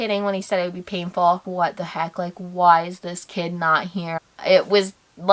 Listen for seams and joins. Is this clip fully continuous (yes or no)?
no